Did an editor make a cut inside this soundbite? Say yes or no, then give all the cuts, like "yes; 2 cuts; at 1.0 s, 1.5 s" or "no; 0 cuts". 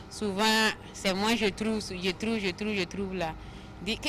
no; 0 cuts